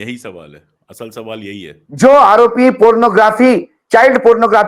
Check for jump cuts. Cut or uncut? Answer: uncut